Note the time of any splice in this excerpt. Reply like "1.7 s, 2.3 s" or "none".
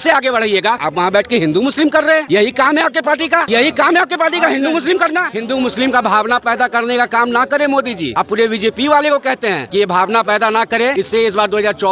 0.8 s, 2.2 s, 3.5 s, 5.3 s, 8.0 s, 9.6 s, 10.9 s